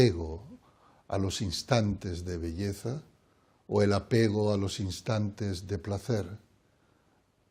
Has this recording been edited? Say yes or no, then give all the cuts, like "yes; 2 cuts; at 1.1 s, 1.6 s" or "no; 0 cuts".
no; 0 cuts